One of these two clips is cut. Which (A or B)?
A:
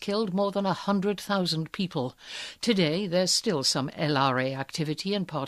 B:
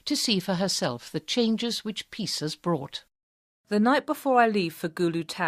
A